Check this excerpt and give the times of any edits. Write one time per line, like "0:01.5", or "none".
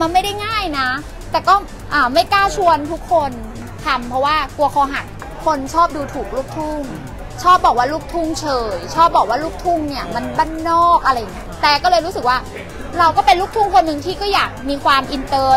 0:03.6
0:05.2
0:11.5